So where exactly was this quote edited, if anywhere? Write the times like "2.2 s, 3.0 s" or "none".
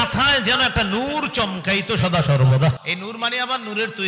2.8 s